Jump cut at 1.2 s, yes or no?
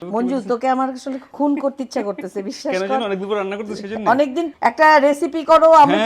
yes